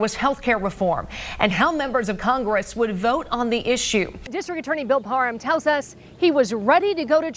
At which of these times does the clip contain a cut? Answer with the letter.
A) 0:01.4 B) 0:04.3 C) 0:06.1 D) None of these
B